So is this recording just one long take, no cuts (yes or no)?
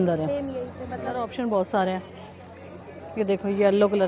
no